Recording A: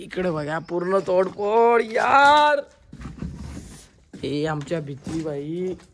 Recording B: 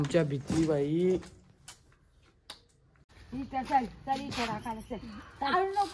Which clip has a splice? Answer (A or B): B